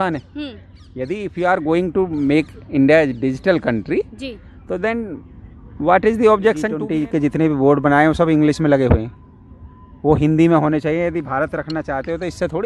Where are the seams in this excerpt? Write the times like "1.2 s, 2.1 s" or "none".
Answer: 6.8 s